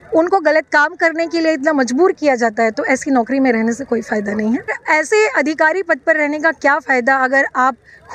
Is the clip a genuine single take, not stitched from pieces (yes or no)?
no